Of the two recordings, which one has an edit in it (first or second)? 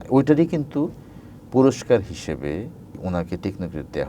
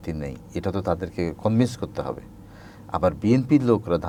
first